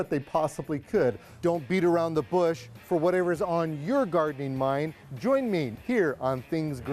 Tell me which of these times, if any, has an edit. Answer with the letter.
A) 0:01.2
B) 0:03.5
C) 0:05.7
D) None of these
C